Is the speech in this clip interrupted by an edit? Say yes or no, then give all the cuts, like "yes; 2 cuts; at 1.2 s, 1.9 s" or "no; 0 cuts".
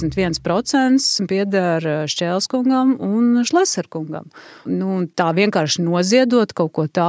yes; 2 cuts; at 1.2 s, 4.7 s